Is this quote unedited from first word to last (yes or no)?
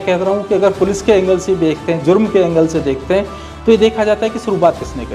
yes